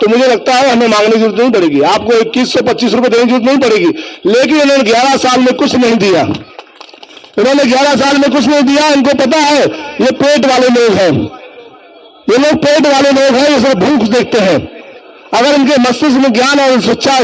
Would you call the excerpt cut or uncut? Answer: uncut